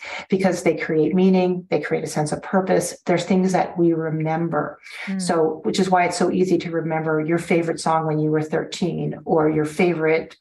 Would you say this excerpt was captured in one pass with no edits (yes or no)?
no